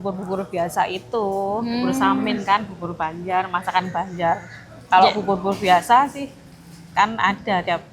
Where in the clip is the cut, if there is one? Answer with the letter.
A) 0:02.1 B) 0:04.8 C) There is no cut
C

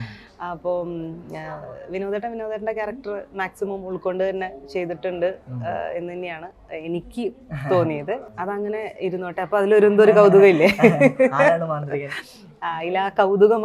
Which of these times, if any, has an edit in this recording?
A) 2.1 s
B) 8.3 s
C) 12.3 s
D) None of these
B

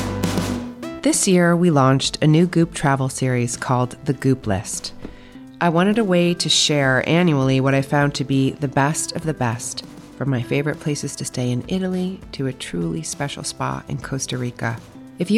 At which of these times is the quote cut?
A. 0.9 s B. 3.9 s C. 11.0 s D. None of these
A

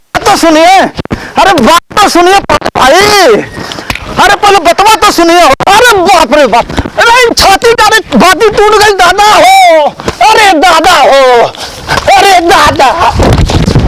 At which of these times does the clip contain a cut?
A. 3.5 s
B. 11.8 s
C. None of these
C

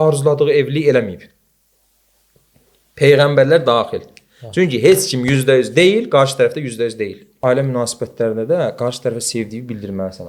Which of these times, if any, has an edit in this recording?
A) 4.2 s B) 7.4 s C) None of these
B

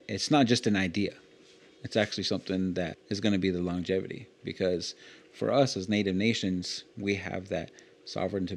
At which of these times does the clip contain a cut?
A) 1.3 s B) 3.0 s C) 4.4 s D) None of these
B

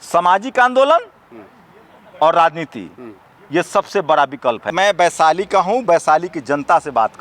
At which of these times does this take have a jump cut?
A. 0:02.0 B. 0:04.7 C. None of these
B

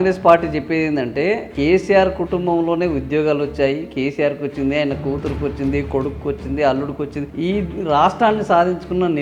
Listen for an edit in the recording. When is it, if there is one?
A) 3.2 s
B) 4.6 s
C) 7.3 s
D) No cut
C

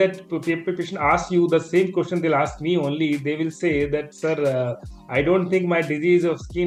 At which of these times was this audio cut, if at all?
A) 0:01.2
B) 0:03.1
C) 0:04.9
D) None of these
D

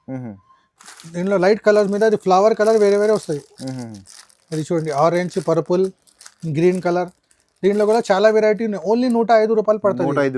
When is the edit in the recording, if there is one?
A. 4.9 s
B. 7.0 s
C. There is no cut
C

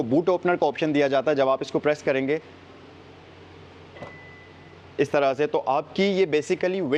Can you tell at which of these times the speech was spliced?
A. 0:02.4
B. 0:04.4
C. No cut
C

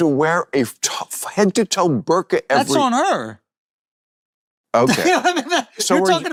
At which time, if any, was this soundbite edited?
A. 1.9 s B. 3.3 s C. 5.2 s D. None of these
D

